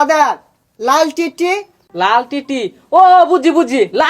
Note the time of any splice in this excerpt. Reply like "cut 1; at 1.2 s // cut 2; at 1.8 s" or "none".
cut 1; at 1.8 s